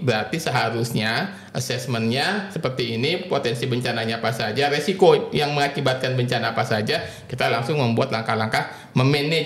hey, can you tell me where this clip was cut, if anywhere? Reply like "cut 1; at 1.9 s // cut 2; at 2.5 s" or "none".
none